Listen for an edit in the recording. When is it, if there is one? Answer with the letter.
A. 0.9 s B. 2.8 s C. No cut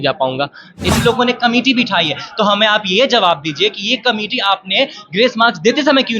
A